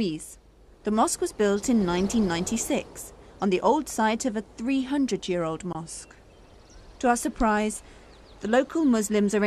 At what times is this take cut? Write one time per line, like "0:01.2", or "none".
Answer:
none